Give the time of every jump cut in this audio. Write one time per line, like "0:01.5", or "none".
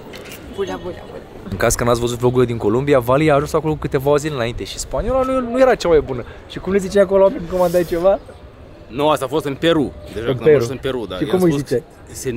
0:01.5